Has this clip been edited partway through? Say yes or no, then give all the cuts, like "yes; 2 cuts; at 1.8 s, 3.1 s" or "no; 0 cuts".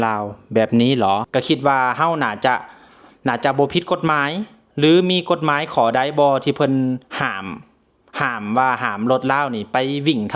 yes; 1 cut; at 1.3 s